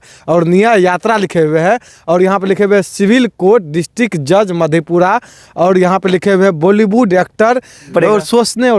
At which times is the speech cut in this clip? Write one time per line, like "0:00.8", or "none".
0:07.9